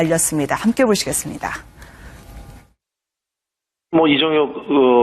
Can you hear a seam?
no; 0 cuts

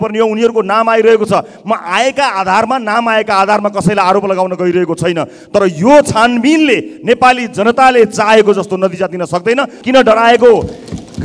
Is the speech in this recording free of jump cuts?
no; 1 cut; at 9.8 s

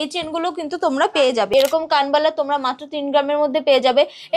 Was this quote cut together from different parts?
yes; 1 cut; at 1.5 s

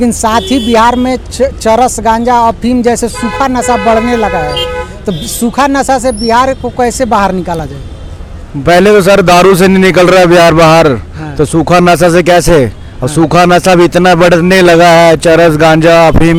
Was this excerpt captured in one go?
yes; 0 cuts

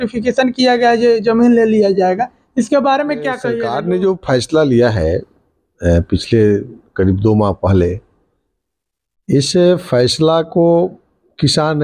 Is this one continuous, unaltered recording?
no; 1 cut; at 3.5 s

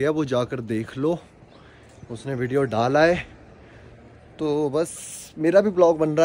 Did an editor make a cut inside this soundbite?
no; 0 cuts

